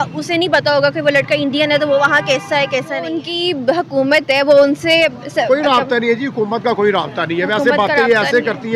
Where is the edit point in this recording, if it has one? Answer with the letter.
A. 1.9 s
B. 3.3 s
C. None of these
B